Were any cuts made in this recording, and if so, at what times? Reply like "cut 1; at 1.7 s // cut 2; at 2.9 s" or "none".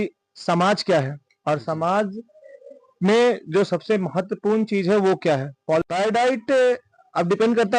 cut 1; at 5.8 s